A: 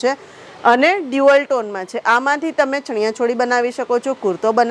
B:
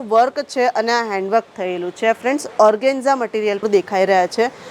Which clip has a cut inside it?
B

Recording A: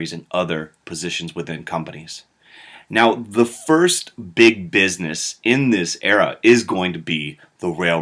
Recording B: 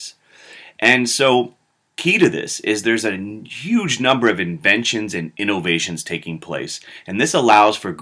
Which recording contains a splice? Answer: A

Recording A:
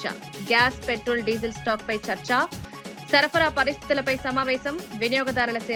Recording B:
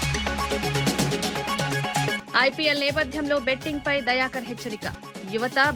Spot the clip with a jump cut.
B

